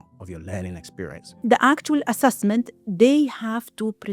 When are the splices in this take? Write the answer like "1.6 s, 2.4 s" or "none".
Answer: 1.4 s